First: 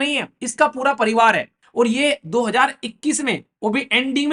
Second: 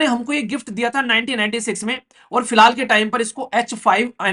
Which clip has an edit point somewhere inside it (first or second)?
first